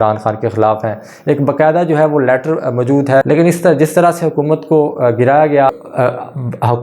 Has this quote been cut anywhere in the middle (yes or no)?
yes